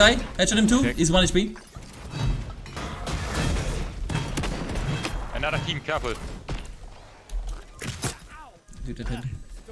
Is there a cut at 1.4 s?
no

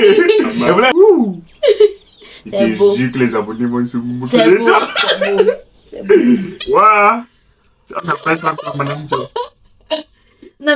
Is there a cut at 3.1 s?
no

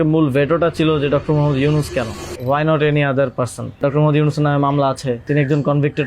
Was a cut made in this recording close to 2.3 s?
yes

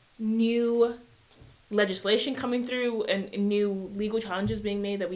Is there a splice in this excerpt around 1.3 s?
no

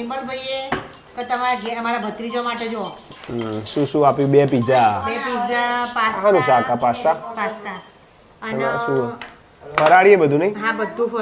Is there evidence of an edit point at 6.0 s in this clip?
no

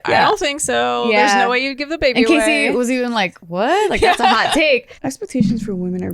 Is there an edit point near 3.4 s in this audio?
no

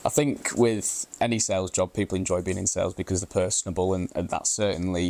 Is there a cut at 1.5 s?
no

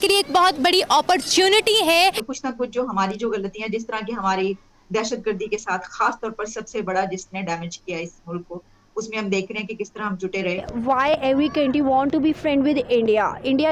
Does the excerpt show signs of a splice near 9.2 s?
no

